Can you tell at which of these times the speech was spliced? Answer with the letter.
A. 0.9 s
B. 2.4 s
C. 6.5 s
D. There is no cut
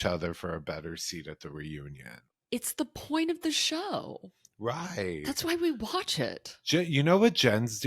C